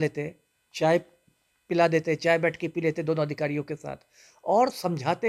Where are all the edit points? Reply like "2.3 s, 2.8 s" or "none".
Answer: none